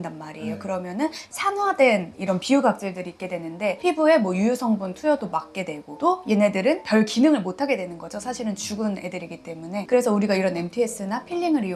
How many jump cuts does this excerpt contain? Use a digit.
0